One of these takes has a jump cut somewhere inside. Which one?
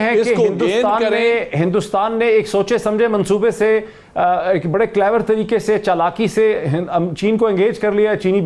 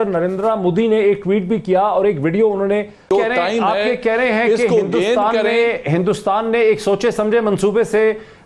second; 1 cut; at 3.1 s

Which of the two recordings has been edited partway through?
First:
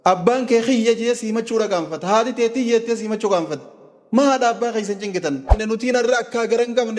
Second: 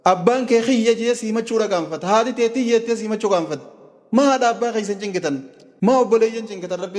first; 1 cut; at 5.6 s

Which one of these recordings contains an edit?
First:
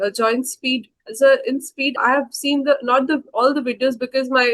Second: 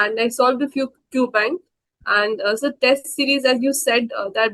first; 2 cuts; at 1.0 s, 2.0 s

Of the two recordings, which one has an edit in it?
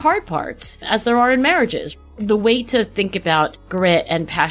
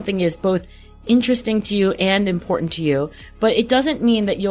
first; 2 cuts; at 1.9 s, 3.6 s

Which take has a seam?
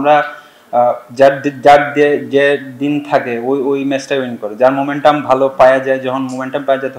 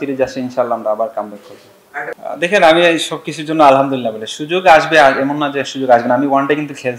second; 1 cut; at 2.1 s

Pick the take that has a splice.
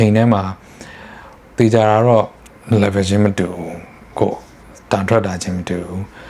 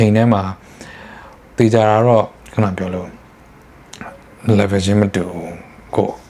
first; 1 cut; at 2.4 s

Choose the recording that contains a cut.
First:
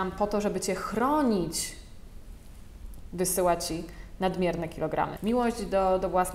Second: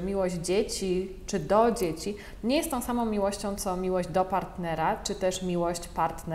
first; 1 cut; at 5.2 s

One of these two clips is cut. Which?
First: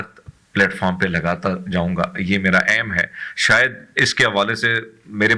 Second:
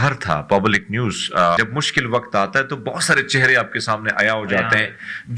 second; 1 cut; at 1.6 s

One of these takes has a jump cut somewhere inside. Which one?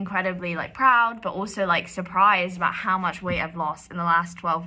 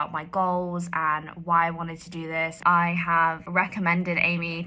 second; 2 cuts; at 2.6 s, 3.4 s

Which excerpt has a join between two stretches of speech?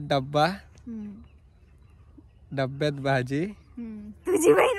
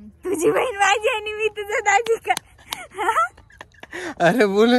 second; 1 cut; at 3.8 s

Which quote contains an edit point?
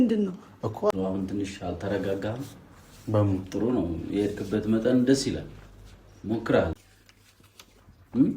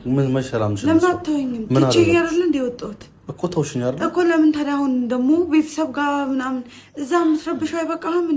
first; 2 cuts; at 0.9 s, 6.8 s

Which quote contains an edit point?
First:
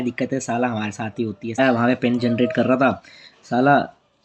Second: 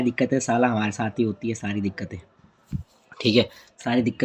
first; 1 cut; at 1.6 s

